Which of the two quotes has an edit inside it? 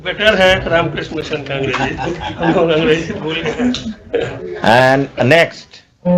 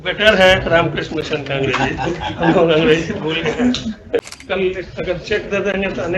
second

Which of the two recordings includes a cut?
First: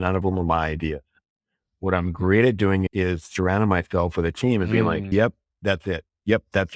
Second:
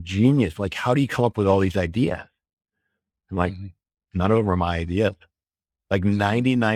first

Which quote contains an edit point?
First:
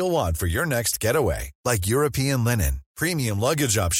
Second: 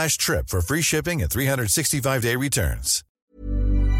second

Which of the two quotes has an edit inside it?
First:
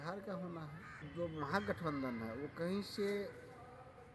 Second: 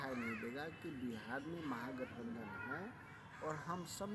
first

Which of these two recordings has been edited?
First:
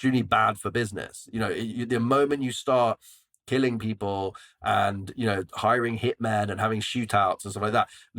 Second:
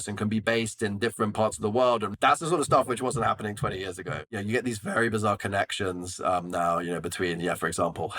second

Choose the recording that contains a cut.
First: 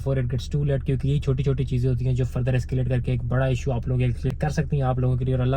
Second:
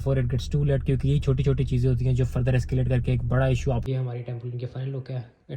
second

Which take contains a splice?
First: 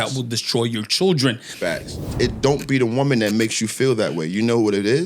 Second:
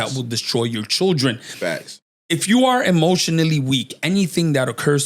first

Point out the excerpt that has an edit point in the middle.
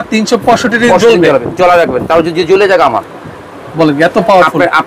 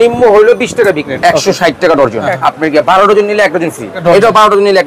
second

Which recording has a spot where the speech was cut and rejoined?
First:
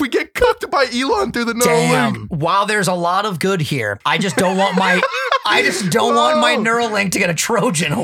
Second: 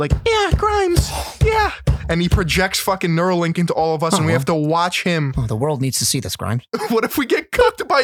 first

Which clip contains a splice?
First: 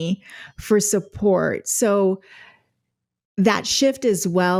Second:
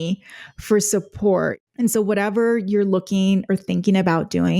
second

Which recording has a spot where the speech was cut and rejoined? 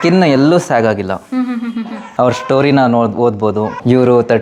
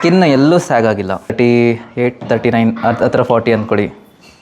second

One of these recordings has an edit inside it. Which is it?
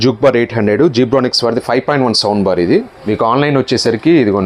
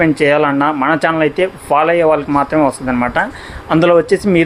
first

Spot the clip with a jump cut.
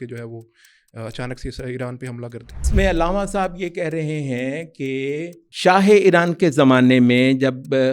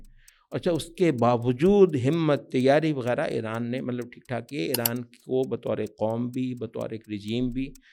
first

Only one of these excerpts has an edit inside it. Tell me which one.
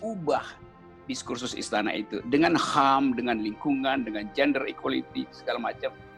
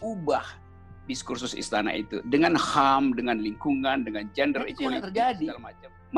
second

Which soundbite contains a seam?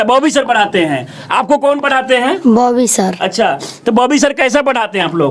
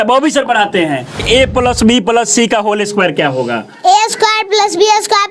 second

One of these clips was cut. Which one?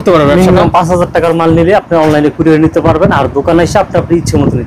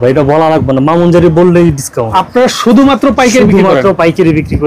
second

